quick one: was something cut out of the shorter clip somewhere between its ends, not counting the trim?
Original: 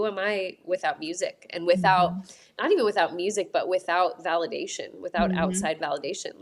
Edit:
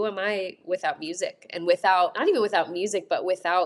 yes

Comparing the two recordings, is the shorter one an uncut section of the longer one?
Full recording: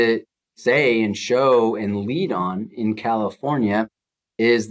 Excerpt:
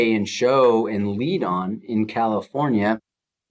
yes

